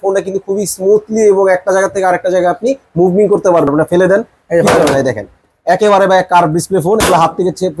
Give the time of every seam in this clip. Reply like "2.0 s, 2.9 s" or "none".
3.7 s